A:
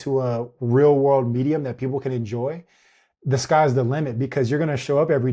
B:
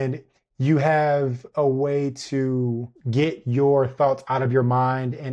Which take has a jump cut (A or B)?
B